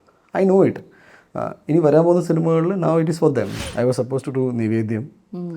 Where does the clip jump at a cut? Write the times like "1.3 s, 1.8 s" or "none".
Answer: 3.5 s